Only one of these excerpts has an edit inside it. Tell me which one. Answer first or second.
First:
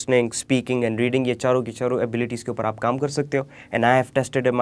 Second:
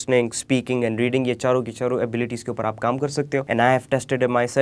second